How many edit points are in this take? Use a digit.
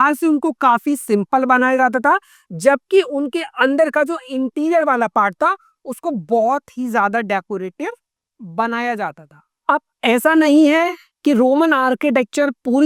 0